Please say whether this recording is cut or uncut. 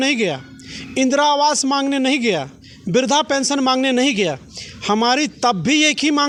uncut